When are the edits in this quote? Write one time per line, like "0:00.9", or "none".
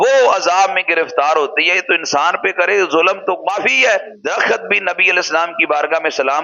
0:04.1